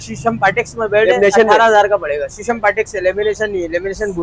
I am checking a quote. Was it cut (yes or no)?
no